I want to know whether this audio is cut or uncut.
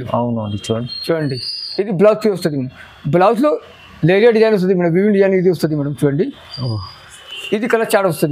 uncut